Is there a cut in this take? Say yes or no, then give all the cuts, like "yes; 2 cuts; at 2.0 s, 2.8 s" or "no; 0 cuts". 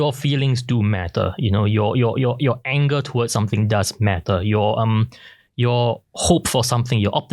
no; 0 cuts